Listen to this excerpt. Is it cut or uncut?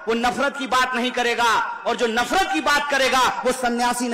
uncut